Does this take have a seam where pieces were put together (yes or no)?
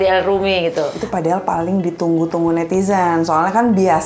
yes